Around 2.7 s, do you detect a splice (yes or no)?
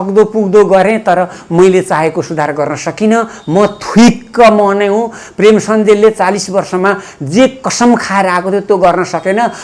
no